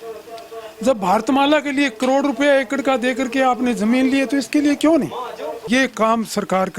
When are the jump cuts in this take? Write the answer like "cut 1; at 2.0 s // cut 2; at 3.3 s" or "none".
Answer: cut 1; at 5.6 s